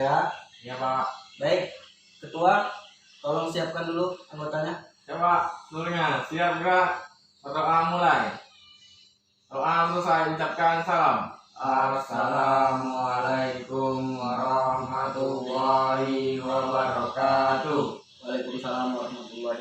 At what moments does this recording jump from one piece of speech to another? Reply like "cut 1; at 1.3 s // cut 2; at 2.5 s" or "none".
none

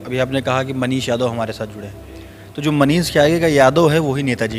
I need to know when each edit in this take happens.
none

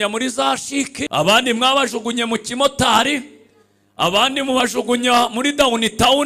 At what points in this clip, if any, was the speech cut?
cut 1; at 1.0 s

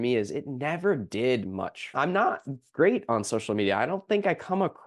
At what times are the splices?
cut 1; at 1.9 s

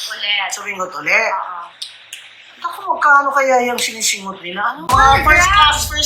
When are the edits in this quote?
cut 1; at 4.9 s

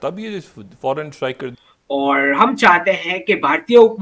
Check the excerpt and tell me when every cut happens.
cut 1; at 1.9 s

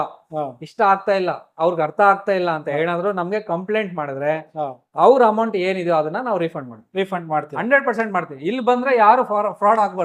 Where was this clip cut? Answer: none

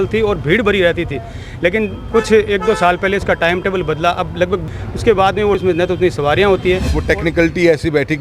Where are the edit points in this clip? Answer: cut 1; at 4.8 s // cut 2; at 5.6 s // cut 3; at 6.9 s

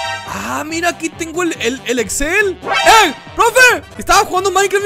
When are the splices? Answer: cut 1; at 3.9 s

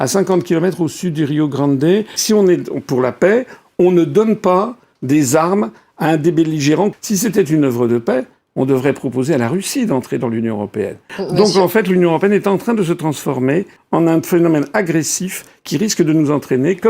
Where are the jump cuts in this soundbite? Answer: cut 1; at 2.2 s // cut 2; at 6.9 s // cut 3; at 11.1 s // cut 4; at 13.8 s

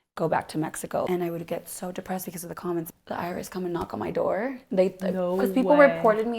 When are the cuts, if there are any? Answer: cut 1; at 1.1 s // cut 2; at 2.9 s

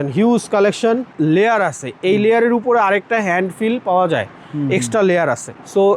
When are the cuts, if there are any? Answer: cut 1; at 1.1 s

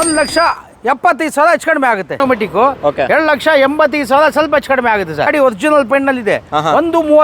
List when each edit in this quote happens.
cut 1; at 2.2 s // cut 2; at 5.3 s

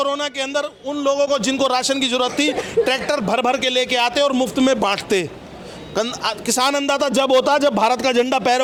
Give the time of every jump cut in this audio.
none

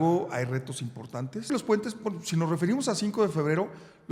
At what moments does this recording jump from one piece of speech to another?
cut 1; at 1.5 s

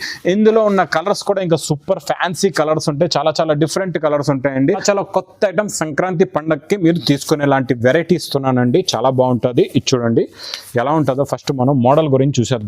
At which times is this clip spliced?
cut 1; at 4.8 s

